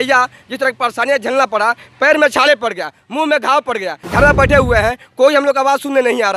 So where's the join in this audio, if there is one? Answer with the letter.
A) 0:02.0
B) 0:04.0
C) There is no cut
B